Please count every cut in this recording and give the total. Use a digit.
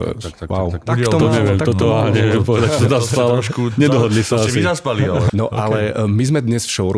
2